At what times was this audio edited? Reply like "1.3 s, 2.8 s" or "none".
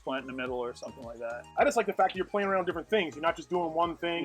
1.4 s